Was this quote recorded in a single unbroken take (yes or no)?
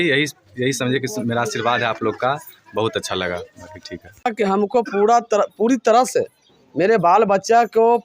no